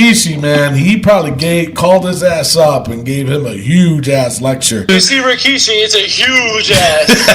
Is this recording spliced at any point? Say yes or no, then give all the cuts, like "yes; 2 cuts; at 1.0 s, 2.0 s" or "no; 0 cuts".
yes; 1 cut; at 4.9 s